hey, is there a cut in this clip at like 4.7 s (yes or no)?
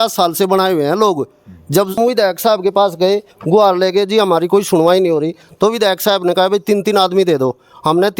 no